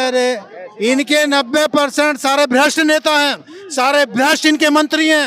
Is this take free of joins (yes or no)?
yes